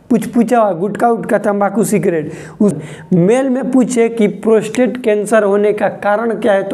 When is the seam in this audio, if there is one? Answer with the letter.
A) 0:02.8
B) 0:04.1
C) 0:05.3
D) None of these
A